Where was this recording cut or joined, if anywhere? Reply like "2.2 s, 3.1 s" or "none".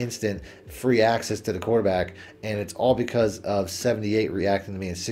none